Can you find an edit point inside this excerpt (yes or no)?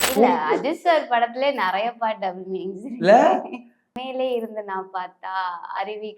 yes